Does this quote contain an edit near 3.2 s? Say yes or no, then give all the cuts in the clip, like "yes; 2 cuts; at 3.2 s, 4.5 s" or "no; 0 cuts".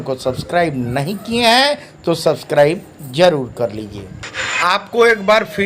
no; 1 cut; at 4.6 s